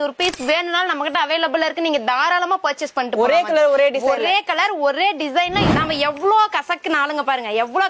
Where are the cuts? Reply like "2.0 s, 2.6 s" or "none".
5.7 s